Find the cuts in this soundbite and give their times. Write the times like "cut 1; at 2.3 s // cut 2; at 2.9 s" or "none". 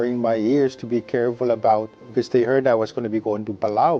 cut 1; at 2.0 s